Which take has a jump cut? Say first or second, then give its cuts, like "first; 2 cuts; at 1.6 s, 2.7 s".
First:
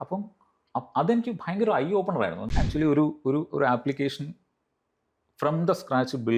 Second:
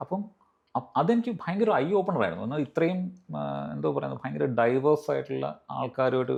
first; 1 cut; at 2.4 s